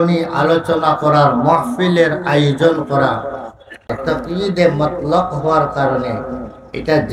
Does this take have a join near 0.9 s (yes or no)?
no